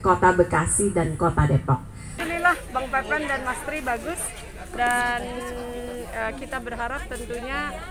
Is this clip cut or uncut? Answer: cut